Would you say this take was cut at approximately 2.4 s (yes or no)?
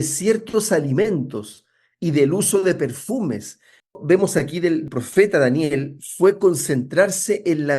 no